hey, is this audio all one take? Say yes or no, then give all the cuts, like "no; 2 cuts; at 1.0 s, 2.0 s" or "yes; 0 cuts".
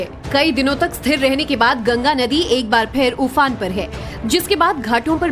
no; 1 cut; at 1.4 s